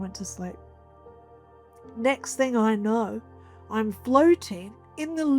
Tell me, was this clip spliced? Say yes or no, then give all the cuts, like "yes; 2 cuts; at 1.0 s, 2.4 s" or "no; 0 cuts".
no; 0 cuts